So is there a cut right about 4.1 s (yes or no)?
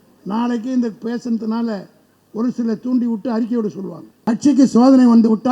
yes